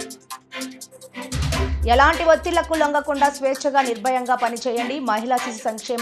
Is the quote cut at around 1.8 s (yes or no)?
yes